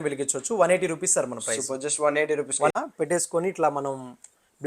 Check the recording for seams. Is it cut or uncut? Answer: cut